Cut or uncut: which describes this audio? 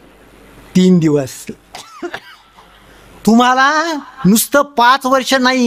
uncut